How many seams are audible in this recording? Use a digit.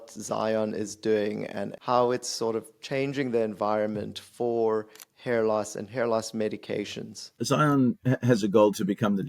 2